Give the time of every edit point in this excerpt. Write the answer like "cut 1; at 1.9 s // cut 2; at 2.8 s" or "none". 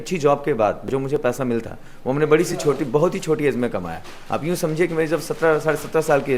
none